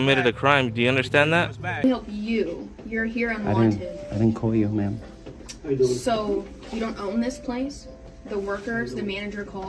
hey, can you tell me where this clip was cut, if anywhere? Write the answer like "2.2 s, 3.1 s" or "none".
1.8 s